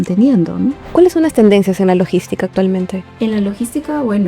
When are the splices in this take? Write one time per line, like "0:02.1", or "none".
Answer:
0:00.9